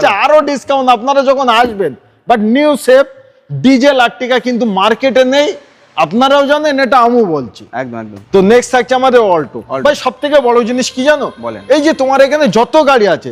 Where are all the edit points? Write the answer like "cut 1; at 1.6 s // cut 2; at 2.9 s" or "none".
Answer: none